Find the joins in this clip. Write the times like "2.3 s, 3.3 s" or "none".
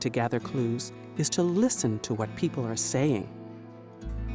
3.3 s